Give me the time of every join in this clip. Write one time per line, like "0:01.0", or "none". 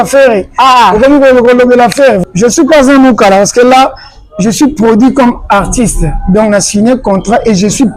0:02.2